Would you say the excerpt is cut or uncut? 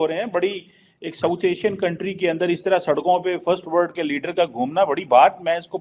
uncut